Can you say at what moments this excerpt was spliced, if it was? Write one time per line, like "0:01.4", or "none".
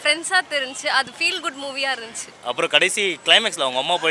0:02.3

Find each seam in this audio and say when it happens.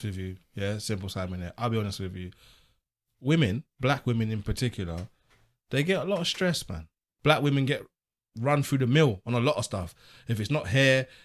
0:07.0

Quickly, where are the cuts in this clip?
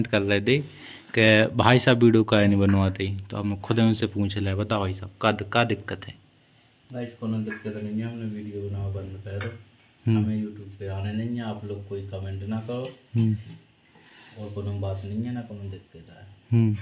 none

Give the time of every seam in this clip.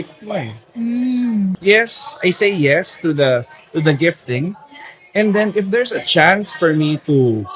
0:01.6

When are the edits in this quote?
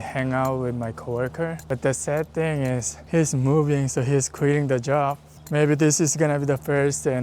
0:01.6
0:02.9
0:05.3

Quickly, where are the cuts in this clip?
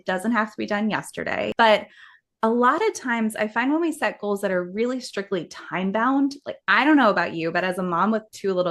0:01.5

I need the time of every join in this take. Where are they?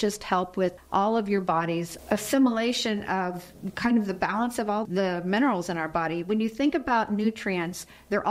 0:04.9

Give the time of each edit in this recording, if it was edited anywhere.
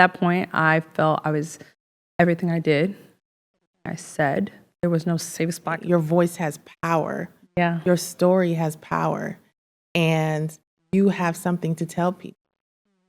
0:05.8

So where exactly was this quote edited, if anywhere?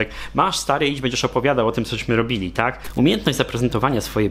0:02.8

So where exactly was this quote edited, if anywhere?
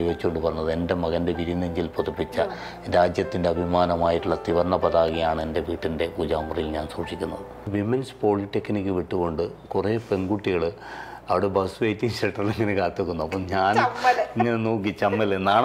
0:07.7

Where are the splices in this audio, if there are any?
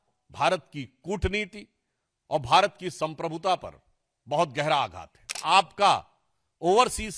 0:05.3

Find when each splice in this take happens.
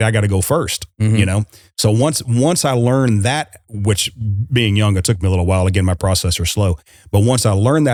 none

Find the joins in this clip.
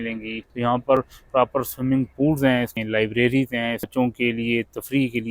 0:00.9
0:02.8
0:03.9

